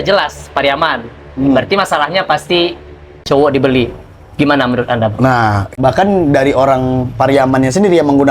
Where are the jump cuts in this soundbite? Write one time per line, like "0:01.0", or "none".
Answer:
0:03.2
0:05.7